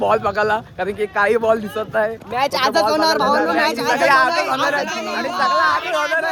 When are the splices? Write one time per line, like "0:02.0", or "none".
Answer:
none